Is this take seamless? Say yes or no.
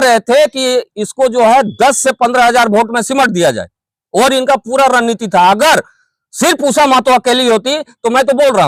yes